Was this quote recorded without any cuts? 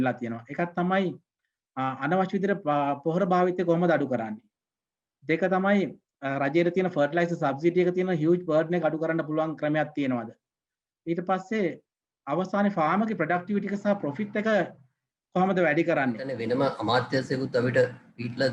no; 1 cut; at 16.3 s

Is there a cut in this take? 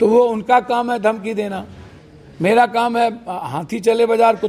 no; 0 cuts

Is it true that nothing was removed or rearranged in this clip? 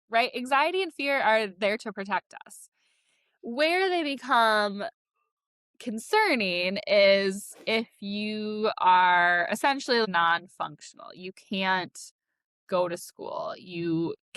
no; 1 cut; at 10.1 s

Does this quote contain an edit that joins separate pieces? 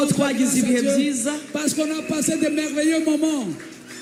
no; 0 cuts

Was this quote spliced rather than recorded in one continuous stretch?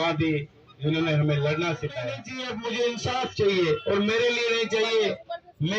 yes; 1 cut; at 2.3 s

